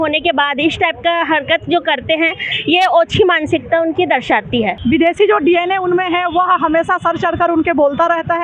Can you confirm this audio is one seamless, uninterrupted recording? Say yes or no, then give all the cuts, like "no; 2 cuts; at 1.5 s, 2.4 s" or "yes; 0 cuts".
no; 1 cut; at 4.8 s